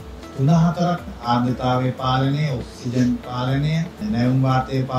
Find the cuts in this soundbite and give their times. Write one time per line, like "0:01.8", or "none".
0:01.1
0:04.0